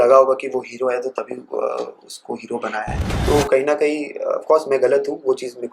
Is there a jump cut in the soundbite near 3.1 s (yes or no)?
yes